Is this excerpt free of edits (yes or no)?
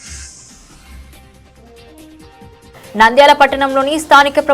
yes